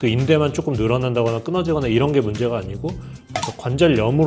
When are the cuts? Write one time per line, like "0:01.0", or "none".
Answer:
0:03.3